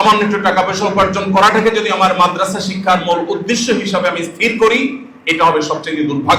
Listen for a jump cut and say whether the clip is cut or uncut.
uncut